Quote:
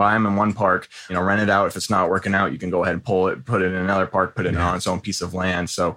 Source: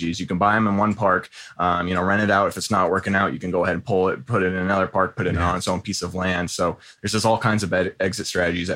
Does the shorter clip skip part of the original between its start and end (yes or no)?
yes